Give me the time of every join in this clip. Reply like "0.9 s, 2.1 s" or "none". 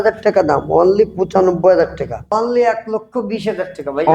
2.3 s